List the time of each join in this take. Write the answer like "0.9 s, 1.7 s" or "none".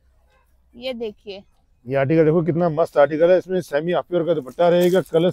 none